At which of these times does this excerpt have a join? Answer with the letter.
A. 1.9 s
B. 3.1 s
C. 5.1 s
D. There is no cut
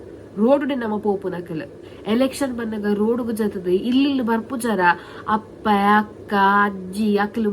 A